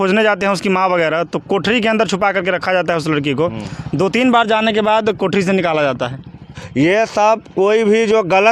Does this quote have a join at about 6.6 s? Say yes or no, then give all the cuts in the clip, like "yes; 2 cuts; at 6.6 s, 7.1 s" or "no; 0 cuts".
yes; 1 cut; at 6.6 s